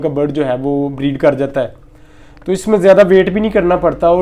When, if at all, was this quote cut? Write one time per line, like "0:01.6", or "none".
none